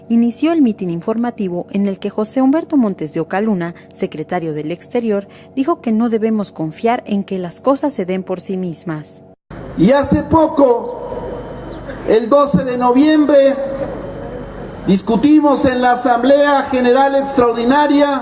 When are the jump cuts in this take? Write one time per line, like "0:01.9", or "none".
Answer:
0:11.4

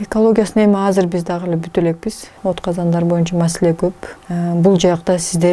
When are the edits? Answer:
0:02.3
0:04.2

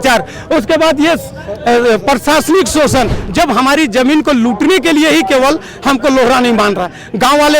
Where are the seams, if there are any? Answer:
0:03.2

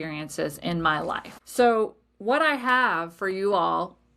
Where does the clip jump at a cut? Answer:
0:01.3

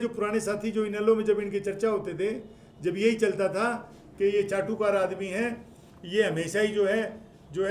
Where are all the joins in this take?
none

